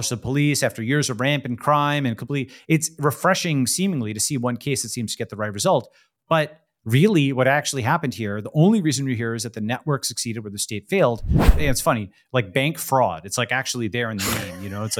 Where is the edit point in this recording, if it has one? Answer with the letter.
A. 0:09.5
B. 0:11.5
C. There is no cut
B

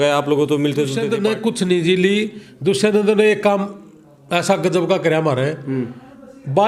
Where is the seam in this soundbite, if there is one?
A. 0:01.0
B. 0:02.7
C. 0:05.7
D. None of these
A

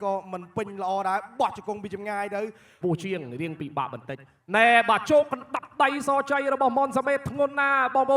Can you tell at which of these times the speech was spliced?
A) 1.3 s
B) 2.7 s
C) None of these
B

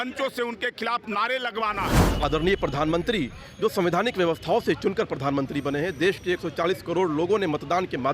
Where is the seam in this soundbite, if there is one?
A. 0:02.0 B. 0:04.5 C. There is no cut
A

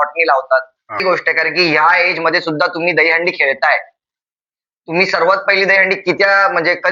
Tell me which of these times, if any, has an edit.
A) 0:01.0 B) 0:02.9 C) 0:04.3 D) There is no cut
A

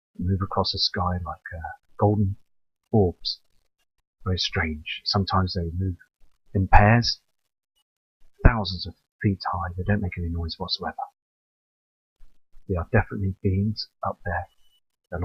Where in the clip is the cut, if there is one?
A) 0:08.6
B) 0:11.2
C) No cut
A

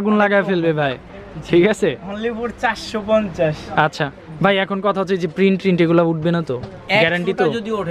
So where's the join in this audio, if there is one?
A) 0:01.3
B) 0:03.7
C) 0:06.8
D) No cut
D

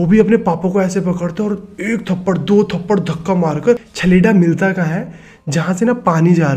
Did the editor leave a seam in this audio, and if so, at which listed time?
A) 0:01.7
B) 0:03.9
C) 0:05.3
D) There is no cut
B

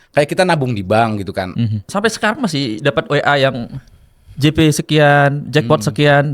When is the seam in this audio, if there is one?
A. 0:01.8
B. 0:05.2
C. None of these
A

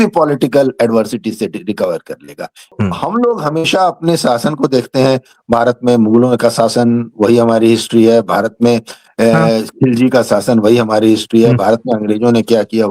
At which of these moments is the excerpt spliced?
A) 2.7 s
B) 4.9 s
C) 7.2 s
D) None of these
A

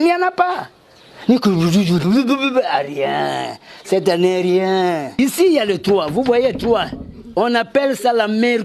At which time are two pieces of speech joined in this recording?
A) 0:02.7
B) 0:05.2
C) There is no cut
B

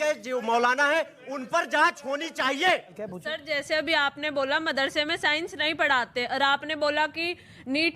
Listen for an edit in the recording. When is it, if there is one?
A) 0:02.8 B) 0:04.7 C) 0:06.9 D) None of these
A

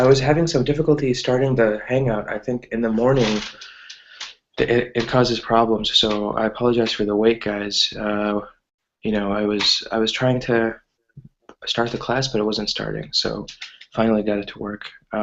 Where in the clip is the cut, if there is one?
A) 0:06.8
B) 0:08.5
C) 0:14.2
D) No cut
C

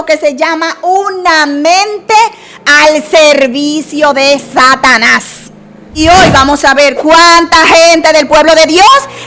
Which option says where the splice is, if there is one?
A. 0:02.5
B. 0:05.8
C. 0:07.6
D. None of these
B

